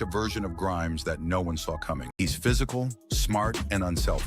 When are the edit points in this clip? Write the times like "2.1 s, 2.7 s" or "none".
2.1 s